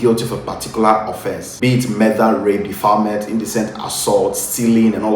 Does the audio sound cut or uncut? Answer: cut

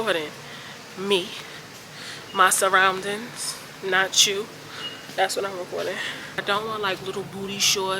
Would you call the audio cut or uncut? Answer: cut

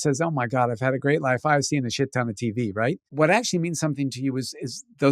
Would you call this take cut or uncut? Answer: cut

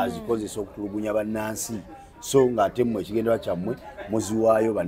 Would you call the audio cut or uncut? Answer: uncut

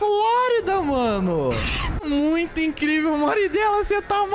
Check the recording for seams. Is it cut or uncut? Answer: cut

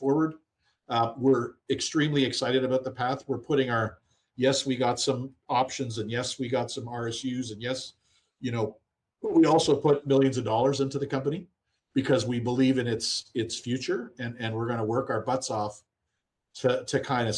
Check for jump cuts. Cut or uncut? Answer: uncut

